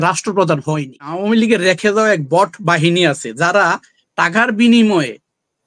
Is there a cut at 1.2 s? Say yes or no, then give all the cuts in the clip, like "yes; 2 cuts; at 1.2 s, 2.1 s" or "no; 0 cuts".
yes; 1 cut; at 1.2 s